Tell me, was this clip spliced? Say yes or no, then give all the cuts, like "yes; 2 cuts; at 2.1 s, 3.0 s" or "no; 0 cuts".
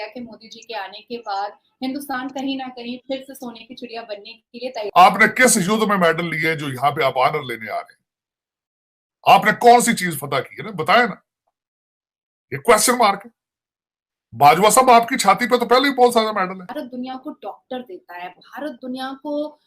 yes; 2 cuts; at 4.8 s, 16.6 s